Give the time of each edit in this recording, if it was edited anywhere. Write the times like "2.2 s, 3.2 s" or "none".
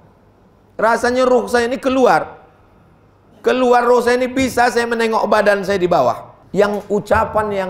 6.3 s